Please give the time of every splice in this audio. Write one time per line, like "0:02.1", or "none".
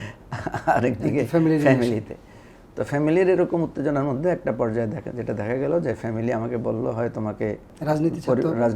0:07.7